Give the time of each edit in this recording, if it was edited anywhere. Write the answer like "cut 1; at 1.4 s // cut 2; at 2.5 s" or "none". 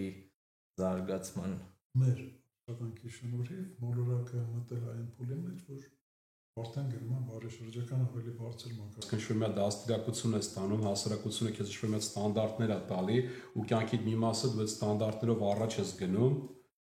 cut 1; at 1.8 s // cut 2; at 9.0 s